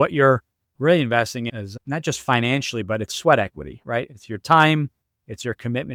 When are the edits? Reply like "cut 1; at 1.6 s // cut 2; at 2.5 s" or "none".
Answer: none